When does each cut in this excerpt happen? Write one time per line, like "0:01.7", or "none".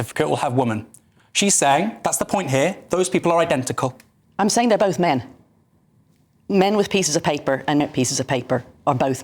0:07.8